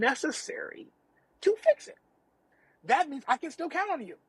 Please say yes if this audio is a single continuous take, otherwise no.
yes